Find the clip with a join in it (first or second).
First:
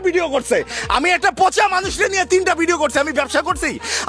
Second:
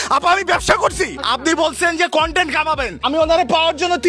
second